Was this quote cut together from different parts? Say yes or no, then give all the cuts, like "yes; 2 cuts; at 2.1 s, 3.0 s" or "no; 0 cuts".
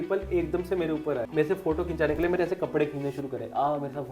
yes; 1 cut; at 1.3 s